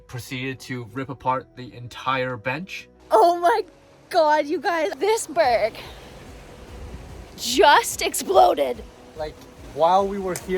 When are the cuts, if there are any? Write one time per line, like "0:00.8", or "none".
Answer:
0:02.9
0:04.9